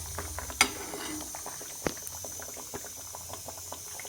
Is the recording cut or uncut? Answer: uncut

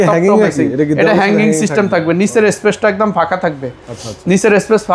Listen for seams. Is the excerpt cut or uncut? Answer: uncut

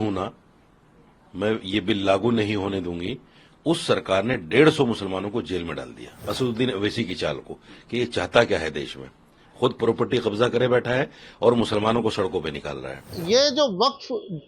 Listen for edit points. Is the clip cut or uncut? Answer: cut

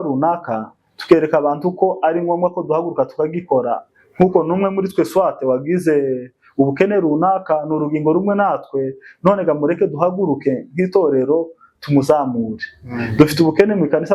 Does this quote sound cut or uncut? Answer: uncut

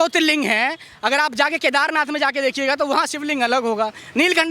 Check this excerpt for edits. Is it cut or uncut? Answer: uncut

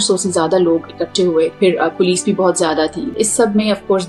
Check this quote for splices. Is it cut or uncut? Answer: cut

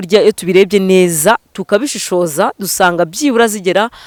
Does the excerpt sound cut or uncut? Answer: uncut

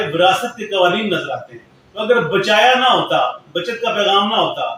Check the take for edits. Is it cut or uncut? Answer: uncut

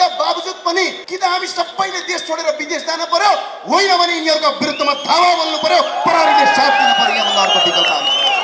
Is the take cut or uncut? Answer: cut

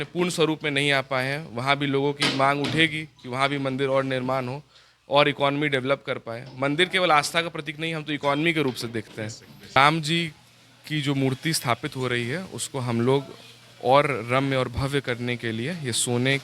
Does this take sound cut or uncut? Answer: cut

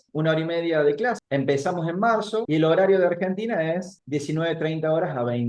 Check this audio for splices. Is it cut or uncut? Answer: cut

